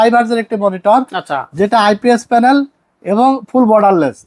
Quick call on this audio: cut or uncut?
uncut